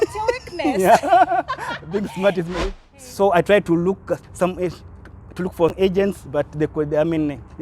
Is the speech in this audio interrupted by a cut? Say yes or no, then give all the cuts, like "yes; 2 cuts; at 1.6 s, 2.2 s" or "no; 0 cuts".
yes; 2 cuts; at 2.6 s, 5.7 s